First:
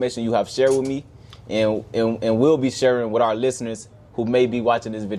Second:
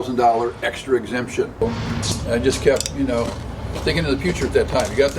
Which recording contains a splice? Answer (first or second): second